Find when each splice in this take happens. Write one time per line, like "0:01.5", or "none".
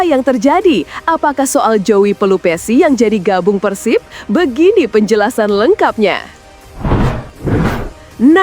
0:06.5